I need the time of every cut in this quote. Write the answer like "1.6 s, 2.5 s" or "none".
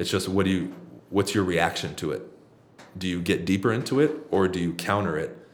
none